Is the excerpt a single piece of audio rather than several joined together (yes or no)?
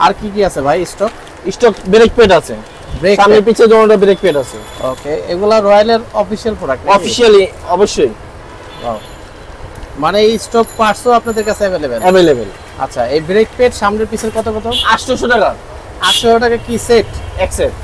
yes